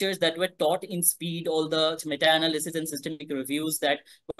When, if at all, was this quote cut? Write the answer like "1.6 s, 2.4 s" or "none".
none